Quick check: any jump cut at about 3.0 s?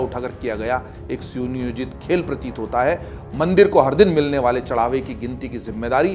no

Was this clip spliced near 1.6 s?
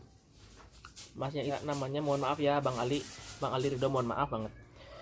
yes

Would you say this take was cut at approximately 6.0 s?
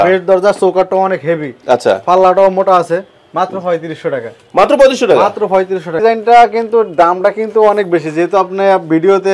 yes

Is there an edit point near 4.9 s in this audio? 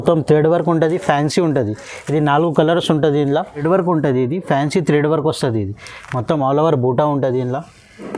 no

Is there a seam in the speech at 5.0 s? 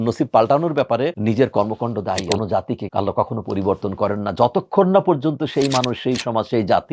no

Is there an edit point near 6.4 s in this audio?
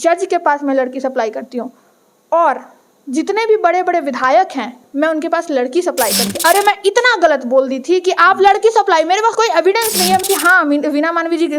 yes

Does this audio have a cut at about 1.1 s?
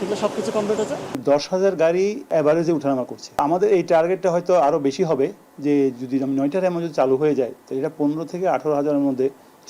yes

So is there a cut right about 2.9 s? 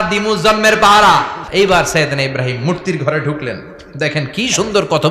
no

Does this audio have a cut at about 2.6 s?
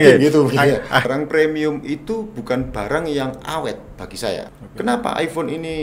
no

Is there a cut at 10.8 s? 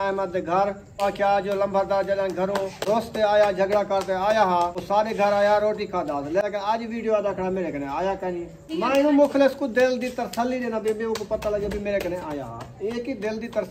no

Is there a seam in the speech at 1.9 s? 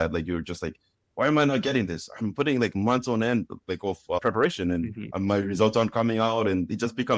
no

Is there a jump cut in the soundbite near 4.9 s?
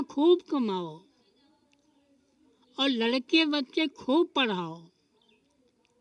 no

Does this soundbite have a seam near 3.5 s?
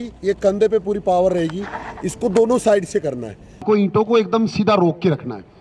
yes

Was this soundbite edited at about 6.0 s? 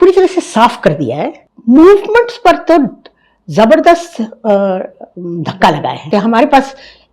yes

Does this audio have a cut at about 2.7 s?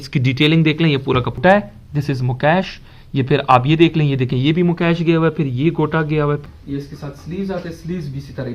no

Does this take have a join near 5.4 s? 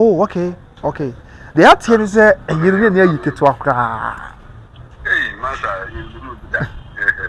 no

